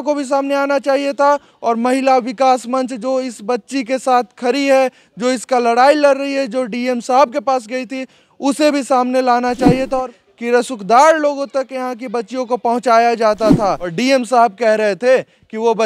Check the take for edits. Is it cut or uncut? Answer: cut